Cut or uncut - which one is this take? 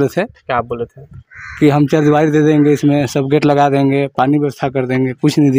uncut